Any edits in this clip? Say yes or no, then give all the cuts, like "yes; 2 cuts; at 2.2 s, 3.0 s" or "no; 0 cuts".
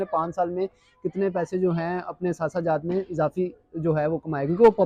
no; 0 cuts